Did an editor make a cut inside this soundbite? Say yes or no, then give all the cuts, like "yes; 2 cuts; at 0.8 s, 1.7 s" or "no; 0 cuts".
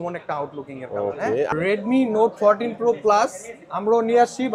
yes; 1 cut; at 1.5 s